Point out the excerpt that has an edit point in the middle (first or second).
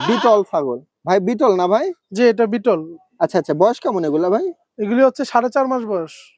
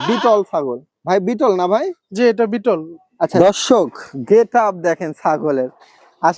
second